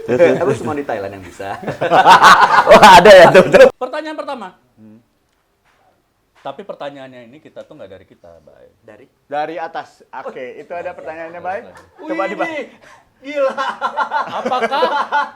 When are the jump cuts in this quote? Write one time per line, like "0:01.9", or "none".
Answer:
0:03.8